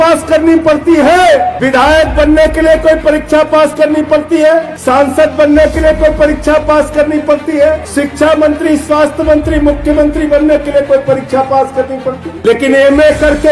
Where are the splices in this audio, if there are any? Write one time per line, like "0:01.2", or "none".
0:01.6
0:04.7
0:07.8
0:12.3